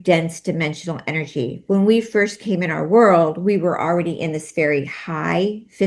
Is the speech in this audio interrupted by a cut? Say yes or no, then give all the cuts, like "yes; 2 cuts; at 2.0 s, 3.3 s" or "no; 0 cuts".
no; 0 cuts